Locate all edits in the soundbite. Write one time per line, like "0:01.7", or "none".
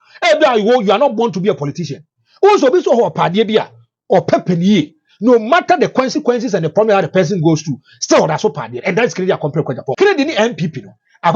0:09.9